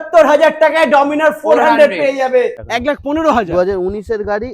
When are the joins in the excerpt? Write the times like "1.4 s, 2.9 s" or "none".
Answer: 2.6 s

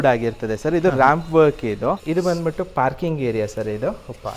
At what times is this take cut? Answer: 2.0 s

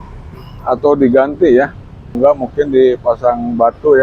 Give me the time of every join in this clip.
2.1 s

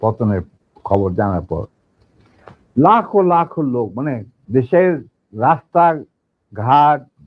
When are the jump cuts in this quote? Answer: 4.3 s

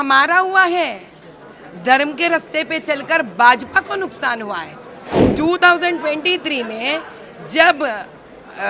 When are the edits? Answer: 5.2 s

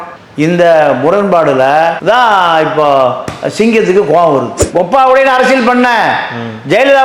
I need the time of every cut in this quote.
4.6 s

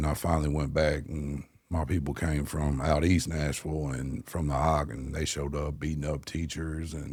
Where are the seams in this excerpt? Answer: none

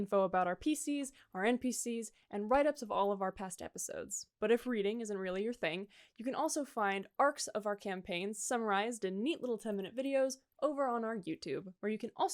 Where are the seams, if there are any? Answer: none

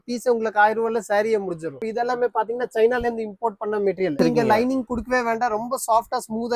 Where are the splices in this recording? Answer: 1.8 s, 4.2 s

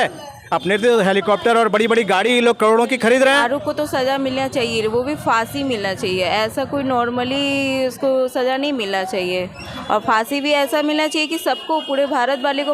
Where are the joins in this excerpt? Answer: 3.4 s

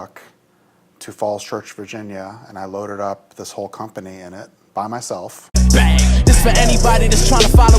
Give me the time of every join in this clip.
5.4 s

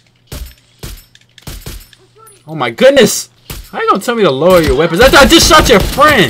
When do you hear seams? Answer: 3.0 s

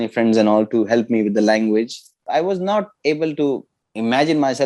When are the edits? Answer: 2.2 s

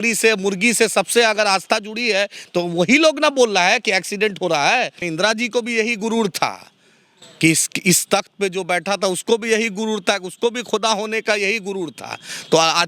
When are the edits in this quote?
5.0 s

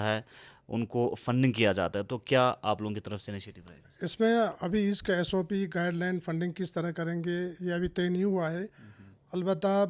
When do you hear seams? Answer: none

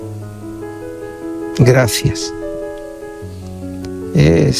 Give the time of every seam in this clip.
1.5 s

